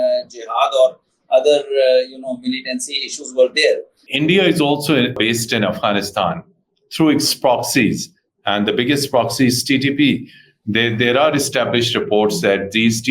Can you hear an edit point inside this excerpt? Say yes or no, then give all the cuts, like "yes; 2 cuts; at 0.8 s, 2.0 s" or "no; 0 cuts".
yes; 2 cuts; at 4.0 s, 5.1 s